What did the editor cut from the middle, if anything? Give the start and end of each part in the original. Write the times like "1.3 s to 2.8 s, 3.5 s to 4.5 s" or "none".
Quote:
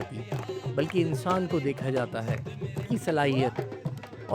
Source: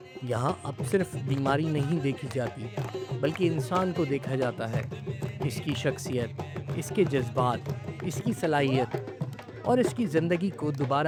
5.3 s to 8.2 s